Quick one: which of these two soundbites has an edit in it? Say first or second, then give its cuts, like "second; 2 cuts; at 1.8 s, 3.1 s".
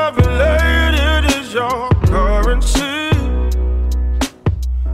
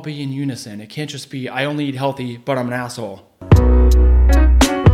second; 1 cut; at 3.3 s